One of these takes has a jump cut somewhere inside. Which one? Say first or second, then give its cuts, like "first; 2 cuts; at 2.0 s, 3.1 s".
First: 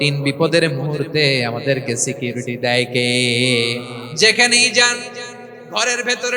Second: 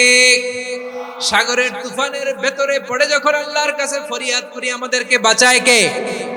first; 1 cut; at 4.1 s